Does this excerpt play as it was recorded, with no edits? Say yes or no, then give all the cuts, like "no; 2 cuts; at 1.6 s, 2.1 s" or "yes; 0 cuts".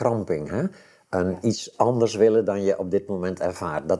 yes; 0 cuts